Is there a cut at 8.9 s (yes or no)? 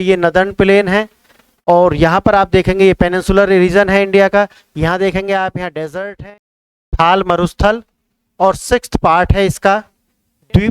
no